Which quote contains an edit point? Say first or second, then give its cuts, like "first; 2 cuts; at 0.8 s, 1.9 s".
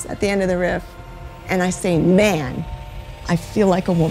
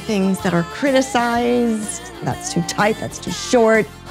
second; 1 cut; at 2.3 s